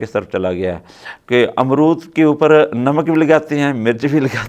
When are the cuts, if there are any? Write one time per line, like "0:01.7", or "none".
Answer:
none